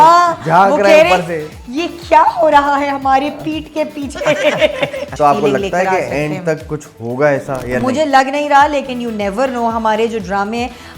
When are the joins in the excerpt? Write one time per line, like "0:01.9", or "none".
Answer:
0:05.1